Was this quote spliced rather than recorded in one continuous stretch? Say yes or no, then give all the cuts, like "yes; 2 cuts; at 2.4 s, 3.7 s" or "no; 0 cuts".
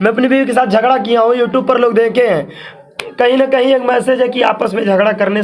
no; 0 cuts